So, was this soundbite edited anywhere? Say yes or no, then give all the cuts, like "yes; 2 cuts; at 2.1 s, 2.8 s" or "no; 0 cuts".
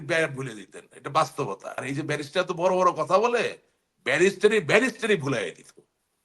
yes; 1 cut; at 1.7 s